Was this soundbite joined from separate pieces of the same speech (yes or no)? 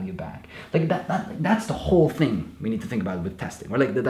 no